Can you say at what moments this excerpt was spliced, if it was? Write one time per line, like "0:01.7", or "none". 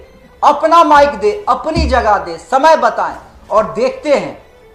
none